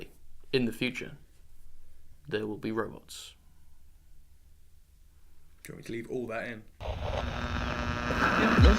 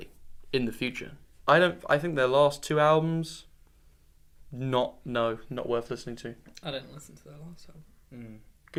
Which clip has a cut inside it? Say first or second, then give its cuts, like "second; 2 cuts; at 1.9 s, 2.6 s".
first; 1 cut; at 1.4 s